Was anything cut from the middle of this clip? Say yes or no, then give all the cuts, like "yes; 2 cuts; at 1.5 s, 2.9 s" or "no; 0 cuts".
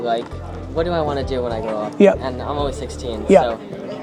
no; 0 cuts